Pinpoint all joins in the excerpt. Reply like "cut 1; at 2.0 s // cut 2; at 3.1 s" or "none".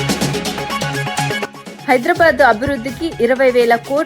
cut 1; at 1.7 s